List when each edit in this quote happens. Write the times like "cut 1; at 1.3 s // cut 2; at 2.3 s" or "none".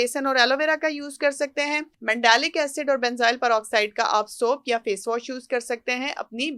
cut 1; at 1.9 s